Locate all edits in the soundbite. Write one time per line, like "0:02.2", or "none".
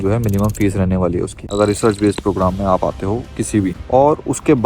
0:01.4
0:03.8